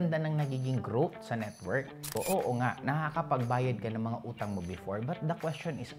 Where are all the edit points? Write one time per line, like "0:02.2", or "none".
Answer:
0:02.1